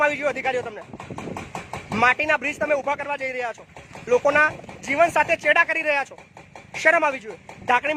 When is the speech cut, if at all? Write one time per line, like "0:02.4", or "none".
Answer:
none